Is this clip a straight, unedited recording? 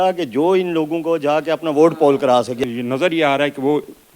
no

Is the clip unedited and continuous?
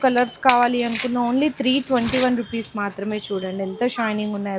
yes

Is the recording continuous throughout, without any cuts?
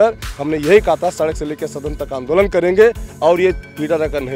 yes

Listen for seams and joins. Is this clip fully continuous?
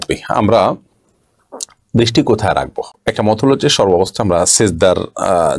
yes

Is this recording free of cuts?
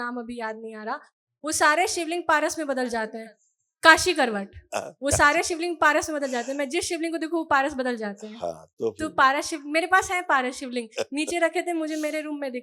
yes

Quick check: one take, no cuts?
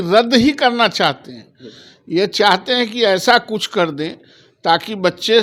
yes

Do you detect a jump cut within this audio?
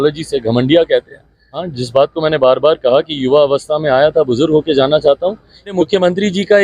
yes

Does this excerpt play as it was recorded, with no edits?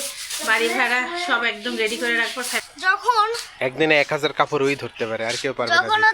no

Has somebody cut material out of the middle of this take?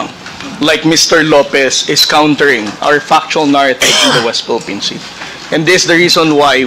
no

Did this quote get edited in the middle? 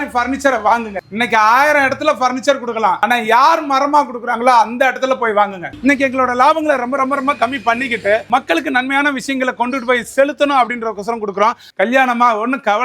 yes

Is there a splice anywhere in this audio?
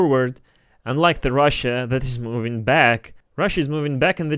no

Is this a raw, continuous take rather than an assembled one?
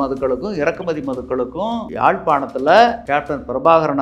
no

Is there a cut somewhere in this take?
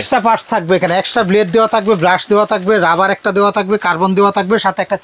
no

